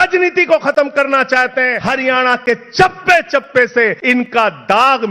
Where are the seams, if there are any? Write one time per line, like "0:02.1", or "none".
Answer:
0:01.8
0:04.0

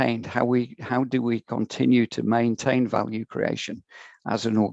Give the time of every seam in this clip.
none

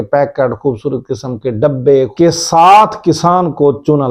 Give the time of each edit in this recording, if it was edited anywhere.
0:02.1

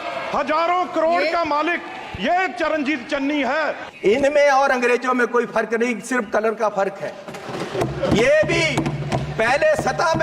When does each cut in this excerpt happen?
0:03.8

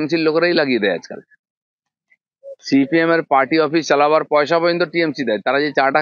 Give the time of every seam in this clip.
none

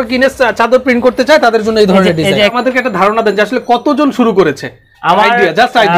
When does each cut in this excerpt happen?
0:02.5

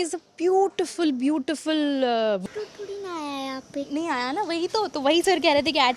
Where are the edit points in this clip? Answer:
0:02.4

